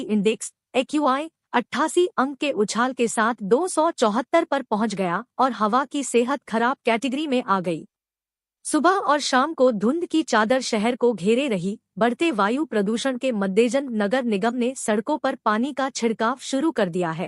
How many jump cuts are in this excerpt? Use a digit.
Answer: 0